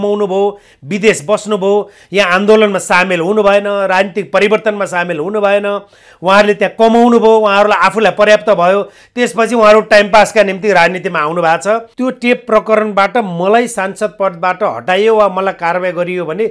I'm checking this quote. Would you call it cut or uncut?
cut